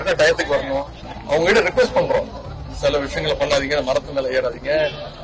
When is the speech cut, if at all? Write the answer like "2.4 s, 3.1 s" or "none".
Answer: 1.1 s